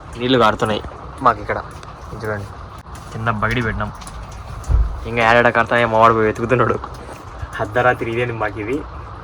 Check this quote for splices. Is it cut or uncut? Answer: cut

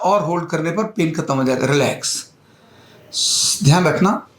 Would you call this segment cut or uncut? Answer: uncut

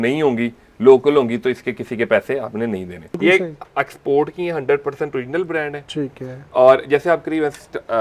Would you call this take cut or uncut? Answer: cut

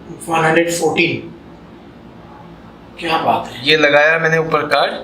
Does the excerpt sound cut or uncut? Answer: uncut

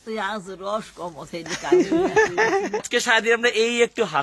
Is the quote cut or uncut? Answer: cut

